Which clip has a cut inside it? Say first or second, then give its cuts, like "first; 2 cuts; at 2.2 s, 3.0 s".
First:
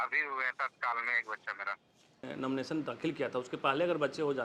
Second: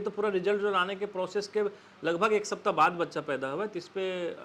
first; 1 cut; at 2.3 s